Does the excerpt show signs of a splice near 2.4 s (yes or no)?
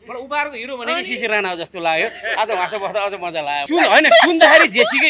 no